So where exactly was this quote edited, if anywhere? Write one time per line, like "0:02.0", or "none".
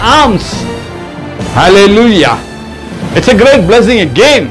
none